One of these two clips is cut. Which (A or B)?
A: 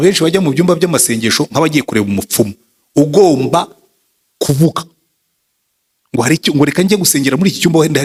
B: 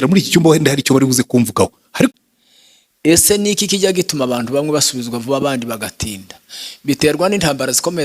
B